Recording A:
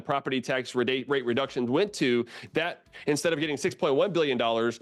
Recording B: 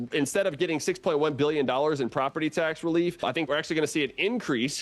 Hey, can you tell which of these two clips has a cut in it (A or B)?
B